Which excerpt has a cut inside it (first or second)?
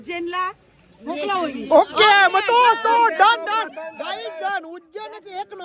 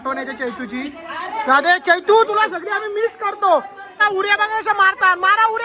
second